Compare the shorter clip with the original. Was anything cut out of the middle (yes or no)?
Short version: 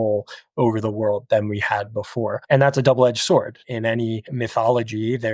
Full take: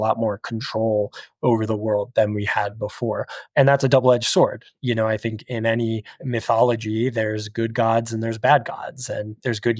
yes